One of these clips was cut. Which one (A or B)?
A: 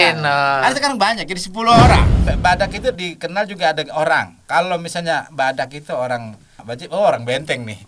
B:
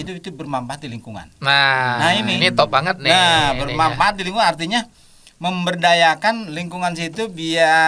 A